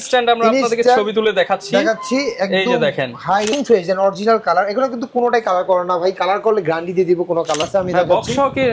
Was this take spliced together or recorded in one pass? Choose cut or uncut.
cut